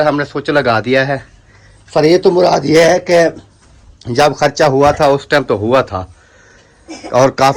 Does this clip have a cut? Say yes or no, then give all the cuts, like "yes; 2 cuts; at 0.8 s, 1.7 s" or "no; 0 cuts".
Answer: no; 0 cuts